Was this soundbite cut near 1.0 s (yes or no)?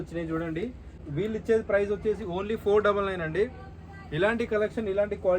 yes